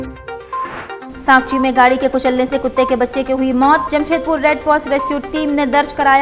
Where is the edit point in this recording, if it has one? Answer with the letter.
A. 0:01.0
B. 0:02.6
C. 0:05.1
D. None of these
A